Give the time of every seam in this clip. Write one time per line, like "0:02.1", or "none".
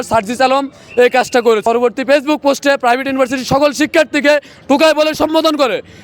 0:01.6